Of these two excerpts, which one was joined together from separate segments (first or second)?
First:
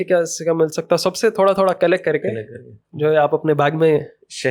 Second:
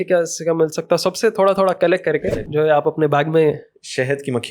second